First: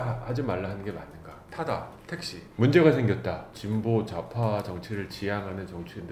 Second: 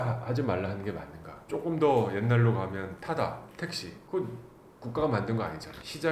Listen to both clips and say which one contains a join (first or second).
first